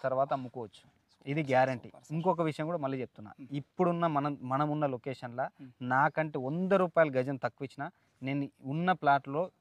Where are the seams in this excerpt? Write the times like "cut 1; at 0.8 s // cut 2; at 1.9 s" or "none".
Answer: none

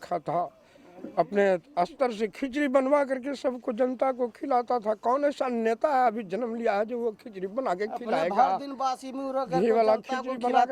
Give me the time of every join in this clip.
none

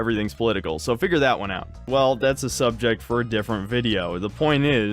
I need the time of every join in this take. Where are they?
cut 1; at 1.7 s

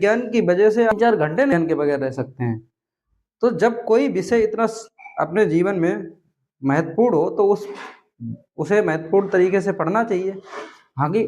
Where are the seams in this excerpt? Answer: cut 1; at 1.1 s

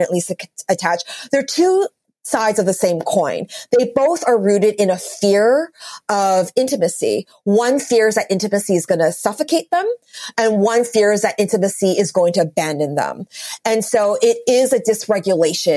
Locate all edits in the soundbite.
none

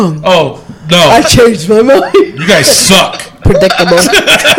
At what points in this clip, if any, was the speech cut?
none

